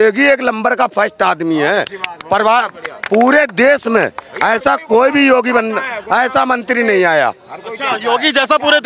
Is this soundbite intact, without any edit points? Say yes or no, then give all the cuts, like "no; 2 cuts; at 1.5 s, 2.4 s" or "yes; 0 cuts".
yes; 0 cuts